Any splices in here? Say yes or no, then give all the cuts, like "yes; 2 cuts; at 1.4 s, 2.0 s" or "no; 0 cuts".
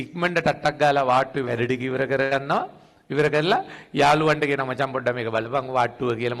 no; 0 cuts